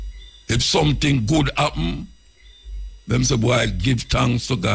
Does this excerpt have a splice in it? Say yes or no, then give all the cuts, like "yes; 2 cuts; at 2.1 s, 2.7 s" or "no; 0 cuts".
no; 0 cuts